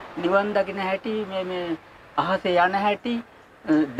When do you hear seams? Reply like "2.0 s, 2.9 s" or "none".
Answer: none